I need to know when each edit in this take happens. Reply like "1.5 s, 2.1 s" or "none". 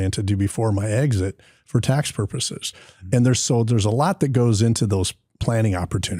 5.2 s